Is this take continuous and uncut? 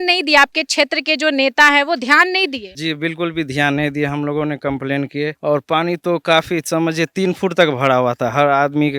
yes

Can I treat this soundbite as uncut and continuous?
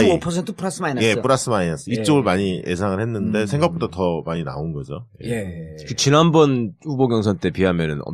yes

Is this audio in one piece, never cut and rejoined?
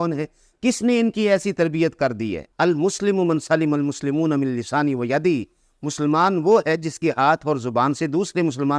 no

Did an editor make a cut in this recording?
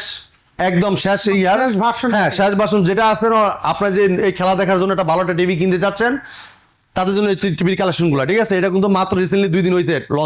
no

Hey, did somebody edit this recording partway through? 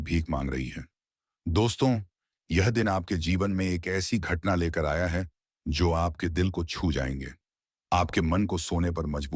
no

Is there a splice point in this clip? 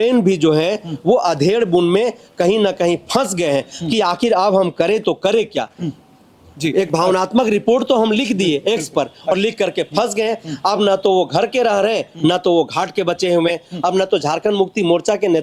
no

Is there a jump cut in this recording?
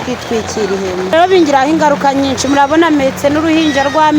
yes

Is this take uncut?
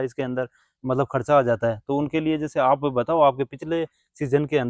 yes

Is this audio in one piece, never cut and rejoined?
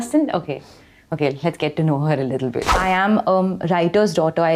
no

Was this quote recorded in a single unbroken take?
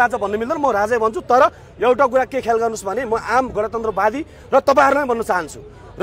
yes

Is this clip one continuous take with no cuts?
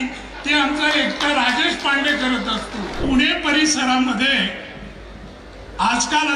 no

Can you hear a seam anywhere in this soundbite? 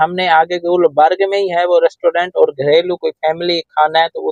no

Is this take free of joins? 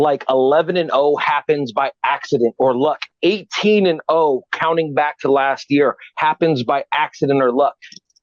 yes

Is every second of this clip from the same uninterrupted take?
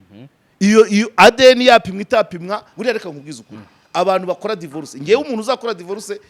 no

